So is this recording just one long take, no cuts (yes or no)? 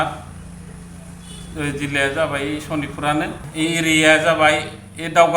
no